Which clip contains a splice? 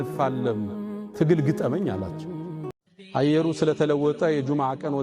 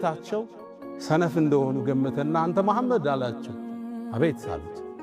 first; 1 cut; at 2.9 s

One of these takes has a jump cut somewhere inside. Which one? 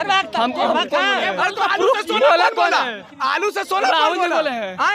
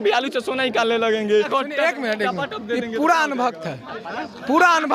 second; 1 cut; at 1.5 s

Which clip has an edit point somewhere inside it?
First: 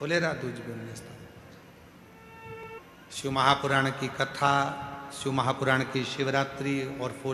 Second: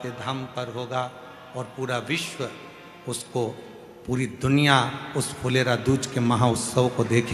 first; 1 cut; at 2.6 s

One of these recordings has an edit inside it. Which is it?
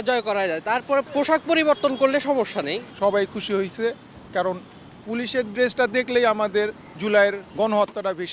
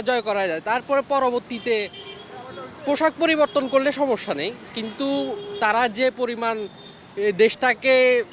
first; 4 cuts; at 1.1 s, 2.9 s, 6.9 s, 7.4 s

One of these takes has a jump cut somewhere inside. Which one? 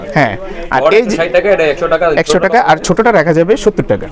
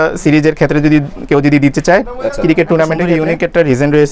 second; 1 cut; at 3.1 s

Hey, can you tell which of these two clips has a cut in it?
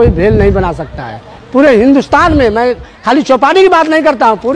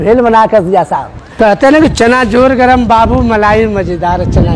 second; 1 cut; at 1.2 s

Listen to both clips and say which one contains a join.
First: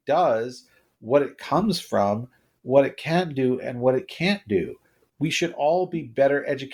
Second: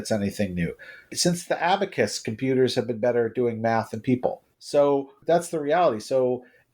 second; 1 cut; at 1.1 s

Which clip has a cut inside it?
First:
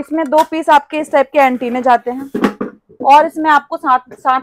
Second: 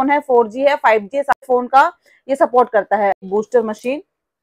second; 2 cuts; at 1.3 s, 3.2 s

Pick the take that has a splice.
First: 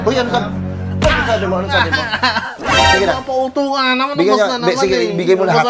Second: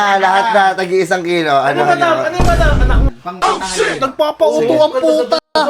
second; 1 cut; at 3.1 s

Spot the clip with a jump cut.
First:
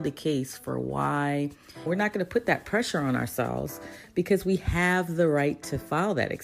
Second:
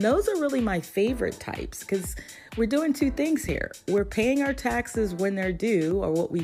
first; 1 cut; at 1.9 s

